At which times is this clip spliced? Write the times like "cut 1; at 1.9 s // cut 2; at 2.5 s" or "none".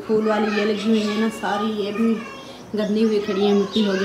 none